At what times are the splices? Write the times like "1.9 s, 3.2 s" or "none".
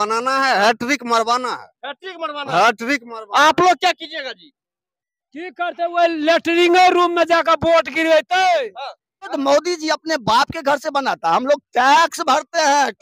9.3 s

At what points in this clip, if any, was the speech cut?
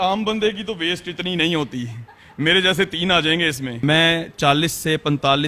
3.8 s

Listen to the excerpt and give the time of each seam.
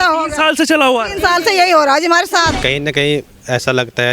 2.6 s

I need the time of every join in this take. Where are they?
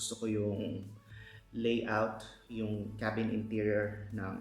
none

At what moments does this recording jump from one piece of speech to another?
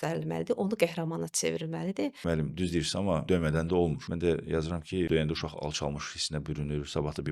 2.2 s, 3.2 s, 4.0 s, 5.1 s

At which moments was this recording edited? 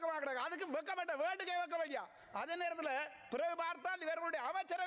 none

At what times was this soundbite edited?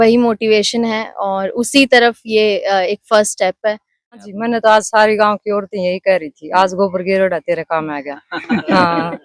4.2 s

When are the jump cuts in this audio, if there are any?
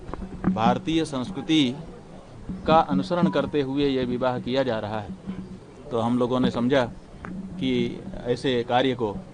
none

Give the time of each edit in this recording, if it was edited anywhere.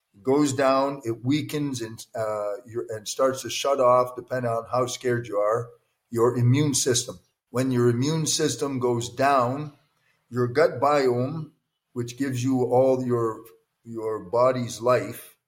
none

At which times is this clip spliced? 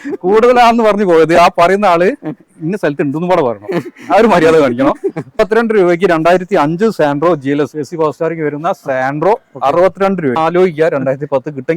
5.4 s, 10.4 s

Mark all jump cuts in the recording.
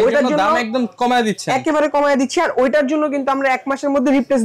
none

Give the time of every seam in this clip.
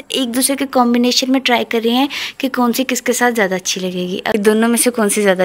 4.4 s

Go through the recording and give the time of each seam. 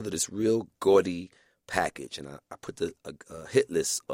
none

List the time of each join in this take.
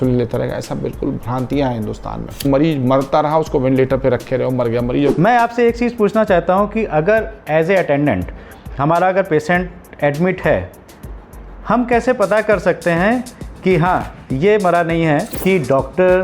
2.4 s, 5.1 s, 15.3 s

